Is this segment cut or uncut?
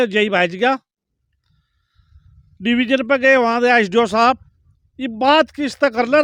uncut